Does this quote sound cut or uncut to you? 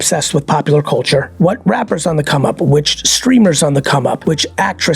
cut